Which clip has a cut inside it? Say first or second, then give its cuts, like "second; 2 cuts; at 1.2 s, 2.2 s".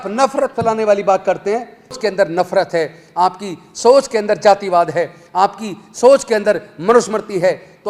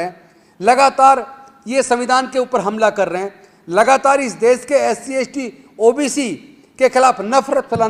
first; 1 cut; at 2.0 s